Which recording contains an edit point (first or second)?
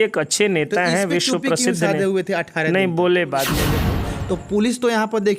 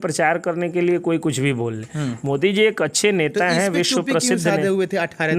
first